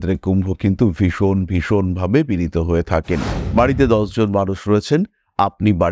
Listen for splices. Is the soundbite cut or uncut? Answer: cut